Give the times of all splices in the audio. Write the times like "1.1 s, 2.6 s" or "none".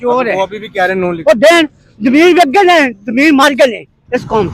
none